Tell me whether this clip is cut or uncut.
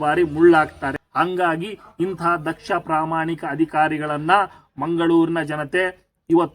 cut